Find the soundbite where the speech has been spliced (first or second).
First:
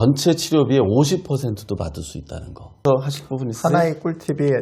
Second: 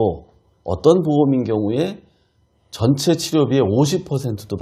first